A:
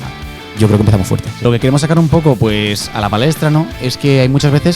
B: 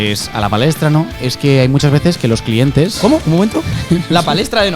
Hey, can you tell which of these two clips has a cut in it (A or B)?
A